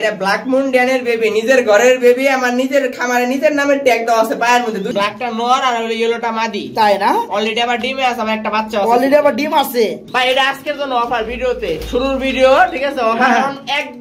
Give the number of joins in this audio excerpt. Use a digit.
2